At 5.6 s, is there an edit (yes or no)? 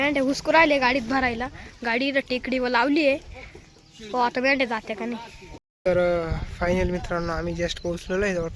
yes